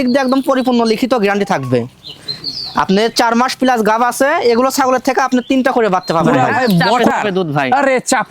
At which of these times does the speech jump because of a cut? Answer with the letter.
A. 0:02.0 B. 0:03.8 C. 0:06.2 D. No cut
C